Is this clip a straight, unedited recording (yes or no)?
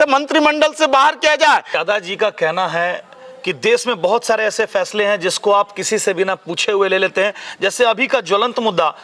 no